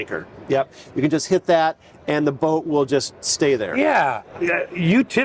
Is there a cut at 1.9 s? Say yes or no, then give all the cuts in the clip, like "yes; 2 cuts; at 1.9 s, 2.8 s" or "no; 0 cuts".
no; 1 cut; at 4.3 s